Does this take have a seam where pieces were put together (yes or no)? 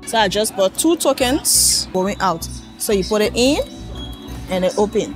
yes